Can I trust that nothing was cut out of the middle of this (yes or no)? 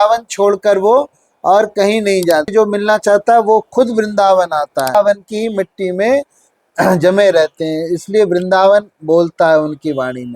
no